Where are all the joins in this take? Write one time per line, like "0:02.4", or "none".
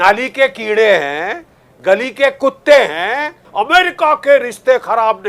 0:03.4